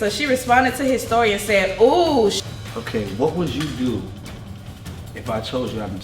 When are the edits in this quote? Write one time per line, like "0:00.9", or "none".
0:02.4